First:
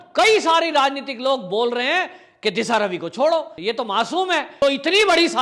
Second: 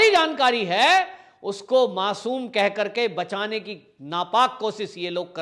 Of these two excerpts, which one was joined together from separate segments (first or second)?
first